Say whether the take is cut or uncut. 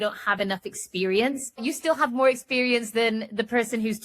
cut